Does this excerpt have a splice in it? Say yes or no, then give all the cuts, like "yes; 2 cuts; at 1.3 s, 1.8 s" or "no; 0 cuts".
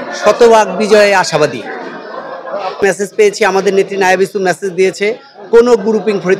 no; 0 cuts